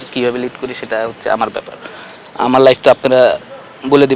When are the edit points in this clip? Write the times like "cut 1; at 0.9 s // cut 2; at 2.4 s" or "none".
none

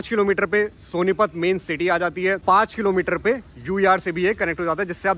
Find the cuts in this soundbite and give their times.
cut 1; at 2.4 s

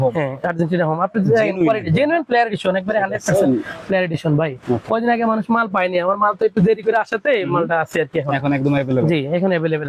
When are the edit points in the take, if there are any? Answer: none

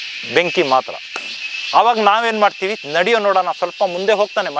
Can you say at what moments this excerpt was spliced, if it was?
none

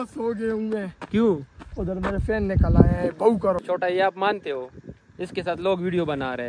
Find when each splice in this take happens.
cut 1; at 3.6 s

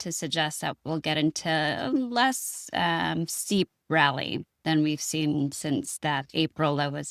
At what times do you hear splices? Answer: none

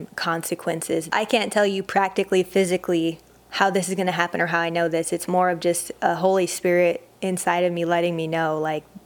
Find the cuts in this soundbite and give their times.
cut 1; at 1.1 s

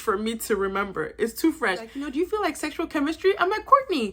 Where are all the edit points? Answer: cut 1; at 2.0 s

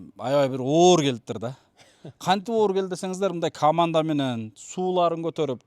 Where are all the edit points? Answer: none

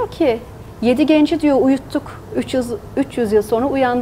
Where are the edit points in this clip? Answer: none

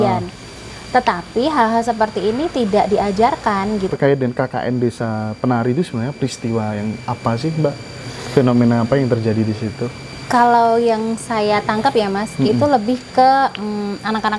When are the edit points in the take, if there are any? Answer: cut 1; at 3.9 s

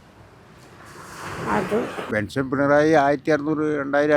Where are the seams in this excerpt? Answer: cut 1; at 2.0 s

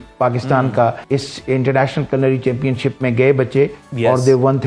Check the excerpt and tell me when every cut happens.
cut 1; at 1.0 s

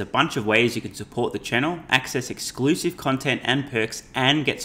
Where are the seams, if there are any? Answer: none

